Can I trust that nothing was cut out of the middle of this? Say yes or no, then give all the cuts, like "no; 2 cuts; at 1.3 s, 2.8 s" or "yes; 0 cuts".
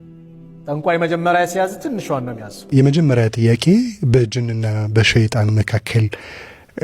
no; 1 cut; at 2.5 s